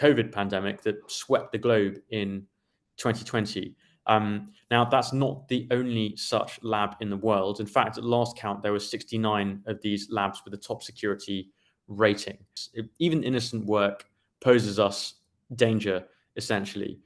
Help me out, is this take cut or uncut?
cut